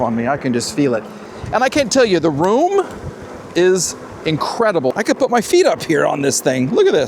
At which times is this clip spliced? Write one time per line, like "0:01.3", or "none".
0:01.2
0:04.9